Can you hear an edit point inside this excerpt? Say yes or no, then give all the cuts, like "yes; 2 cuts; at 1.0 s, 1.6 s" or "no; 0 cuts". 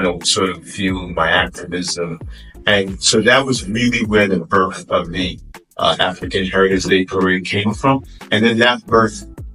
no; 0 cuts